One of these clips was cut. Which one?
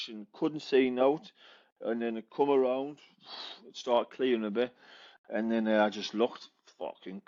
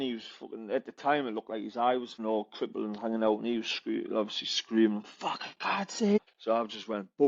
second; 2 cuts; at 2.1 s, 6.2 s

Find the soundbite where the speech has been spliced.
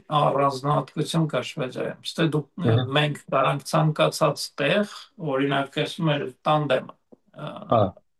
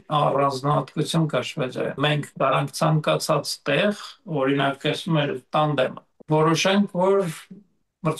second; 2 cuts; at 2.0 s, 6.1 s

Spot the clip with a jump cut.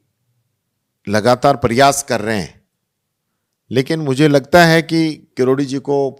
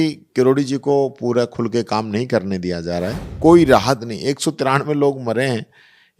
second; 1 cut; at 3.2 s

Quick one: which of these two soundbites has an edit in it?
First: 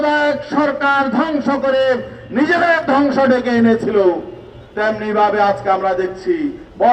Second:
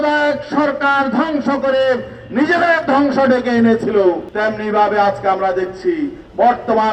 second; 1 cut; at 4.3 s

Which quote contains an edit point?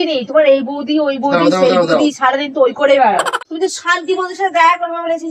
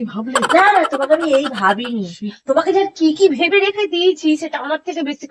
first; 1 cut; at 3.4 s

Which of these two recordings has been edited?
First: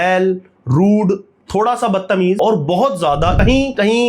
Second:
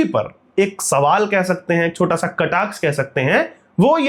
first; 2 cuts; at 2.4 s, 3.4 s

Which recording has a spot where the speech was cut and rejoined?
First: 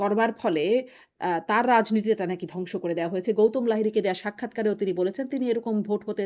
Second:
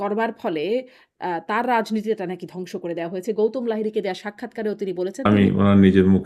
second; 1 cut; at 5.3 s

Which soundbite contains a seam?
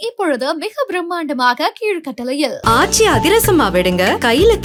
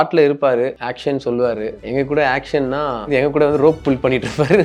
second; 3 cuts; at 0.9 s, 1.8 s, 3.1 s

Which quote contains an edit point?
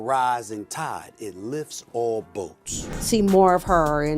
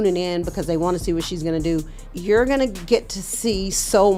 first; 1 cut; at 3.0 s

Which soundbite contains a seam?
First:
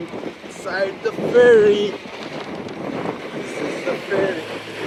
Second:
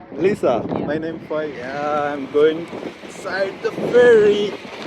second; 1 cut; at 1.2 s

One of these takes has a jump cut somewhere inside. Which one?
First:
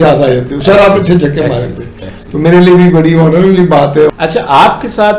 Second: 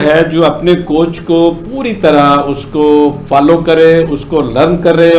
first; 1 cut; at 4.1 s

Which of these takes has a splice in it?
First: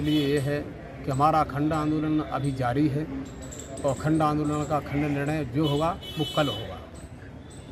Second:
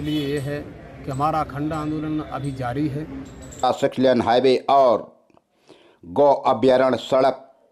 second; 1 cut; at 3.6 s

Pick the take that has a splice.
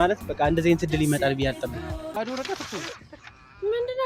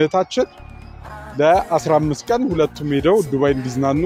first; 1 cut; at 2.1 s

